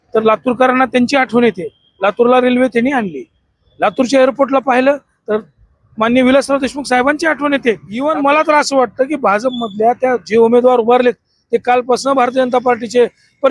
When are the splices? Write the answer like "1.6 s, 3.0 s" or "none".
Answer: 7.9 s